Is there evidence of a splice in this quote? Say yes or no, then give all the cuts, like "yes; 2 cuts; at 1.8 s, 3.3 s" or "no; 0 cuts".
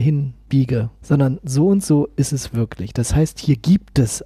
yes; 1 cut; at 0.9 s